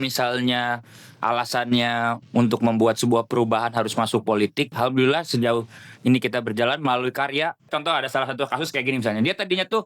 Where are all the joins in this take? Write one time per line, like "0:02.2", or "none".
0:04.7
0:07.7